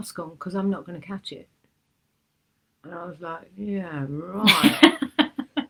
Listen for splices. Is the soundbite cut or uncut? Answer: uncut